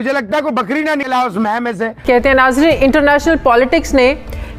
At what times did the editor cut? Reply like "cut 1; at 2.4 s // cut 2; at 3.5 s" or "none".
none